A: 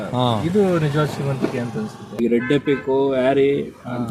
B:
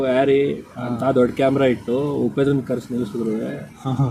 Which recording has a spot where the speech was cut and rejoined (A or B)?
A